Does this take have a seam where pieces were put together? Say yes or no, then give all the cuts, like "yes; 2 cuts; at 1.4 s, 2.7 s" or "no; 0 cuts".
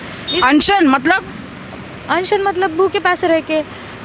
no; 0 cuts